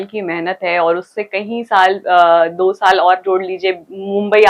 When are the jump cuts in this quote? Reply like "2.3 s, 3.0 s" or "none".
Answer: none

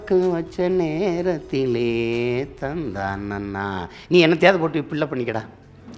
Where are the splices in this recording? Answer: none

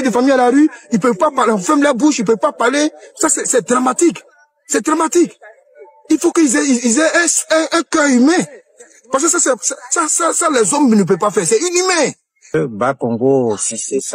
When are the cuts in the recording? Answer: 12.5 s

